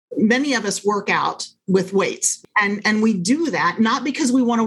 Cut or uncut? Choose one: cut